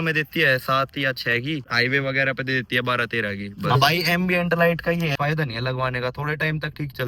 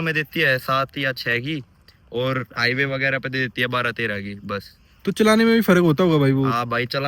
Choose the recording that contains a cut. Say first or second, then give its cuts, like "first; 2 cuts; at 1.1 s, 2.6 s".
first; 3 cuts; at 1.7 s, 3.5 s, 5.1 s